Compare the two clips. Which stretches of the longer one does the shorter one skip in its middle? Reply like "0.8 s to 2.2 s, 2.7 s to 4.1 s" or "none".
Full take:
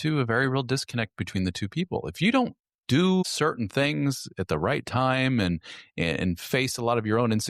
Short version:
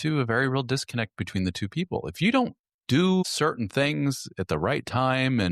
none